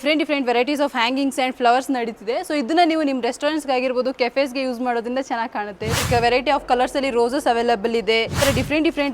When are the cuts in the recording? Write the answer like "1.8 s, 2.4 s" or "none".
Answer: 6.0 s, 8.4 s